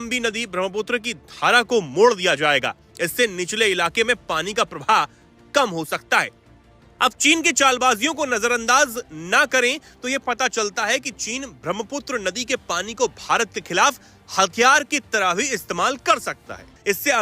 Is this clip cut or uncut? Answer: uncut